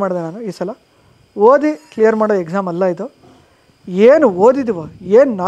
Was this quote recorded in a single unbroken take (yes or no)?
yes